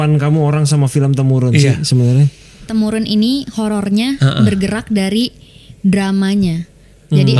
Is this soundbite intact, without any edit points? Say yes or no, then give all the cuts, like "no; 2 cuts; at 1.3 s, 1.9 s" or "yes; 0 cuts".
no; 1 cut; at 2.6 s